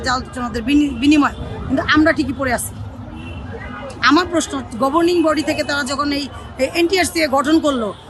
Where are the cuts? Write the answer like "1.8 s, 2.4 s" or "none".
none

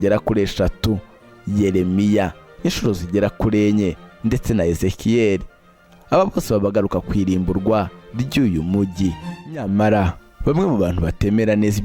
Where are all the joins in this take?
9.2 s

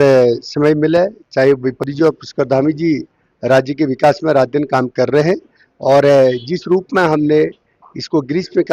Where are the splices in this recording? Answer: 1.9 s

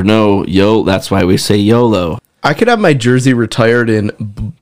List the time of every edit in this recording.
2.2 s

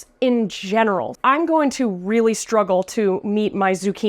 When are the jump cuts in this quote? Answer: 1.1 s

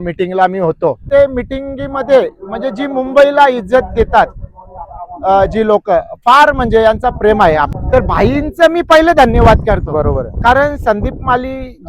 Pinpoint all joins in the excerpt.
1.0 s, 7.7 s

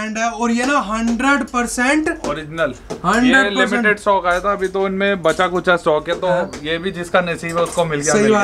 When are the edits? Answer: none

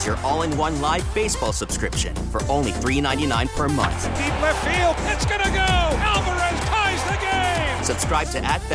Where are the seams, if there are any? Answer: none

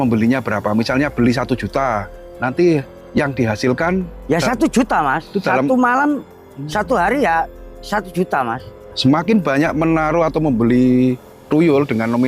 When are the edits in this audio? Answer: 3.0 s, 8.8 s, 11.4 s

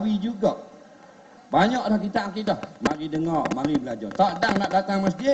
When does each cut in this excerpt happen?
1.4 s

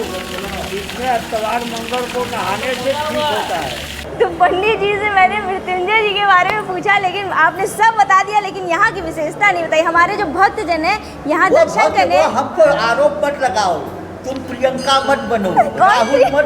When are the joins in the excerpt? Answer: 4.1 s

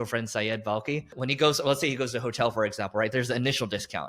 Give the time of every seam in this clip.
1.1 s

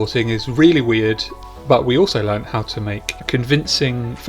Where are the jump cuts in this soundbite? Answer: 1.4 s

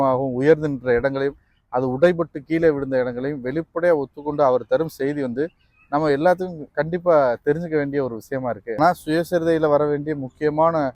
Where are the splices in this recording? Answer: 8.8 s

